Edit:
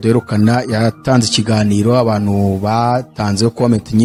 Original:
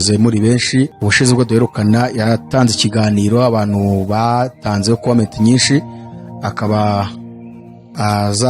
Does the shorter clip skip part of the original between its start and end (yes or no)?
no